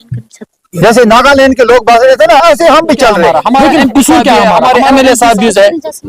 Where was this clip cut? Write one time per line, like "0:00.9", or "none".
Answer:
0:04.6

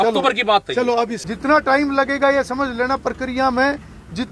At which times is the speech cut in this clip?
0:01.2

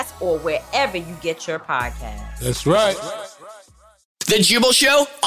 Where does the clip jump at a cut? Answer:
0:04.1

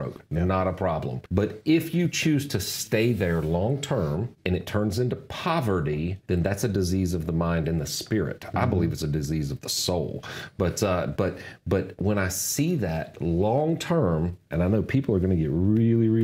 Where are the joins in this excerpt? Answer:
0:01.2
0:04.3
0:06.2

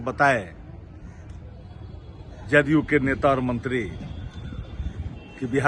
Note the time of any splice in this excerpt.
none

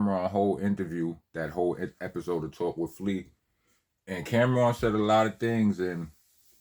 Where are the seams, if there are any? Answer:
0:01.3

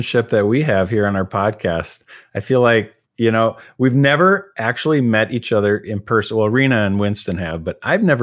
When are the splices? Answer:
none

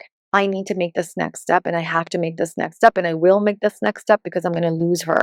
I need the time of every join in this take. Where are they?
none

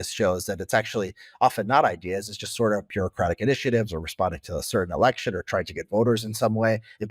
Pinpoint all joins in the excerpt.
0:02.9

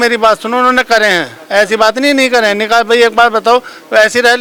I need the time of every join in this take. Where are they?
none

